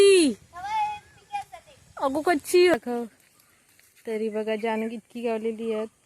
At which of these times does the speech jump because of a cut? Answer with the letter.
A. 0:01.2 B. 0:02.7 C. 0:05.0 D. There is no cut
B